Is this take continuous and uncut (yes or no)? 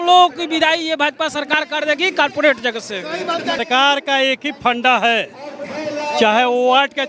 no